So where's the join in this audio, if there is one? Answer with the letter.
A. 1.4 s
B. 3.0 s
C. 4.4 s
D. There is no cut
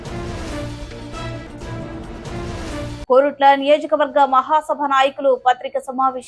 B